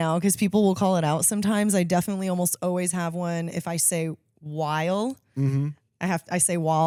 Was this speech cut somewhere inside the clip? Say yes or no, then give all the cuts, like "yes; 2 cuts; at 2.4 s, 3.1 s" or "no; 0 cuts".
no; 0 cuts